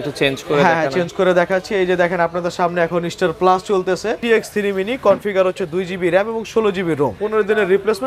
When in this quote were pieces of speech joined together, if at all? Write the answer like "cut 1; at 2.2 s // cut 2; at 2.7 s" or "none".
cut 1; at 4.2 s // cut 2; at 7.2 s